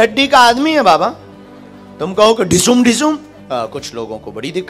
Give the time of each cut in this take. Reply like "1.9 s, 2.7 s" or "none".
3.3 s